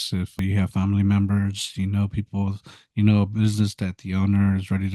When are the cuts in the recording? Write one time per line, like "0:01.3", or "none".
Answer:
none